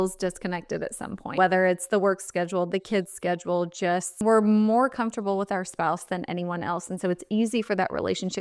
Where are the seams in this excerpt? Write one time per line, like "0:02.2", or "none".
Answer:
0:01.4
0:04.2